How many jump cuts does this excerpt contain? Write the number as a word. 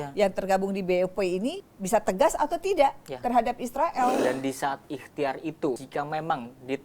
three